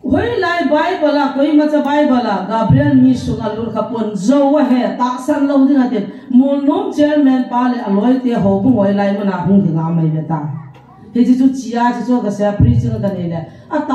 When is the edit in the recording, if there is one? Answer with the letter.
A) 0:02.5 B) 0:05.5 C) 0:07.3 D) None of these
D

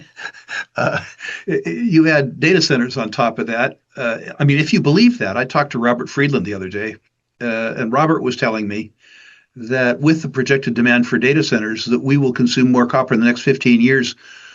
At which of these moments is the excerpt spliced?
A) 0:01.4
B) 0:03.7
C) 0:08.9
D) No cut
D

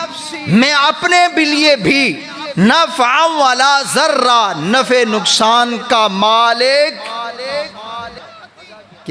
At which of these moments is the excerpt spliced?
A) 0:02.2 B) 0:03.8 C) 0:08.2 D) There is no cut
C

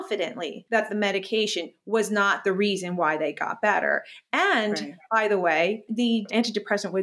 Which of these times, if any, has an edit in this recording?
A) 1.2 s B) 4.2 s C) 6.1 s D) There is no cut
C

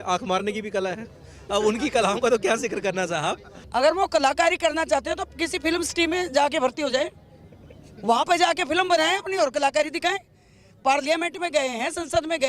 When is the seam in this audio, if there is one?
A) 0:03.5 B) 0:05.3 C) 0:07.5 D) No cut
A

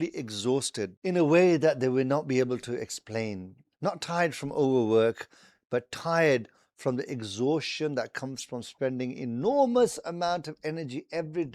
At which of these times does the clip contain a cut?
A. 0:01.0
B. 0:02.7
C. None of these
A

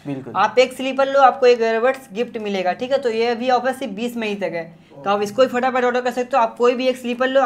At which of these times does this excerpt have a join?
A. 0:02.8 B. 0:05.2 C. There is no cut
C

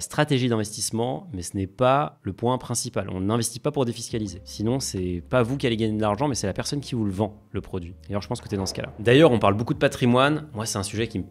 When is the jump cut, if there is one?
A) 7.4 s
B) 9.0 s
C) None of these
C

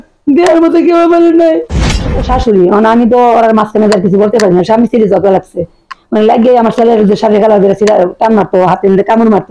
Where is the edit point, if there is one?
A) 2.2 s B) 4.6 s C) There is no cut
A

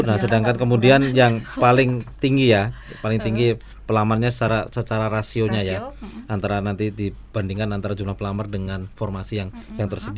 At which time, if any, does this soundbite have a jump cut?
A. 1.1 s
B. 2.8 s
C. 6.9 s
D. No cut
D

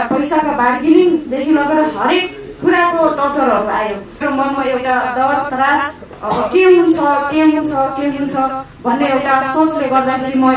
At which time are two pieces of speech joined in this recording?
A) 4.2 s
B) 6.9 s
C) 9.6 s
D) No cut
A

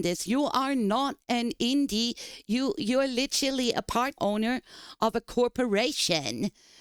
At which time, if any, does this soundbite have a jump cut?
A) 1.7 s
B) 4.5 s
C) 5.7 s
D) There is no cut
D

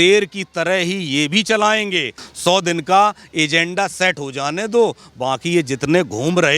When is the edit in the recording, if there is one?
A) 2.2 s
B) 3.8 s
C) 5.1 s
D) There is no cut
A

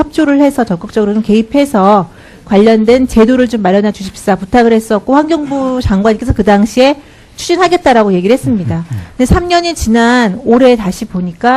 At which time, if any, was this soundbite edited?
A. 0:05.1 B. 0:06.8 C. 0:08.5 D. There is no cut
A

